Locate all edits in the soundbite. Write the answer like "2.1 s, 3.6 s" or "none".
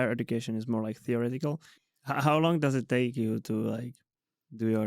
1.7 s